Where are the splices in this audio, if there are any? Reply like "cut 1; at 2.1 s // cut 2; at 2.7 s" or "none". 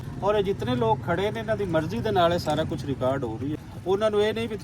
cut 1; at 3.5 s